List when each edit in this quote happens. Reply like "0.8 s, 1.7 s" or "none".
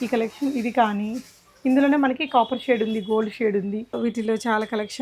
3.9 s